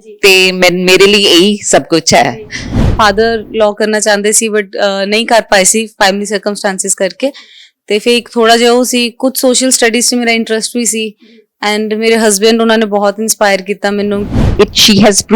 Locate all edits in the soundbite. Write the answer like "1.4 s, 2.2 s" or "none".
2.8 s, 14.4 s